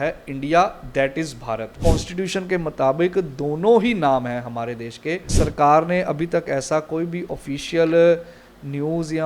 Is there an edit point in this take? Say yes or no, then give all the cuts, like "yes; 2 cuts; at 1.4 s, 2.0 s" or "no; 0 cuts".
yes; 2 cuts; at 1.8 s, 5.3 s